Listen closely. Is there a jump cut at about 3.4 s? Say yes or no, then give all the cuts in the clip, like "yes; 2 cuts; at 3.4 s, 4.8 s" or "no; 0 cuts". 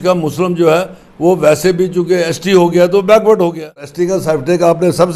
yes; 1 cut; at 3.4 s